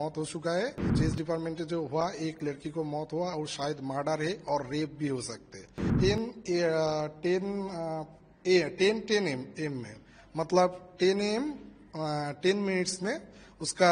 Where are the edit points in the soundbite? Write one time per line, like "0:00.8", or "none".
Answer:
0:00.9
0:05.8